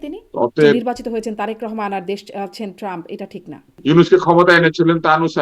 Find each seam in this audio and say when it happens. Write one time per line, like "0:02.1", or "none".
0:00.8
0:03.6